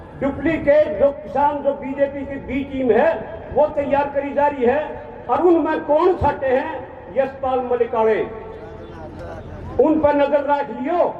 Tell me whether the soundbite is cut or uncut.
uncut